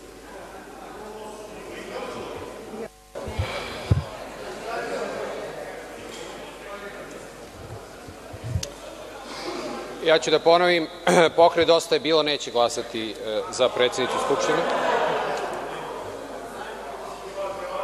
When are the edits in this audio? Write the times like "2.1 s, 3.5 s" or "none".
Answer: none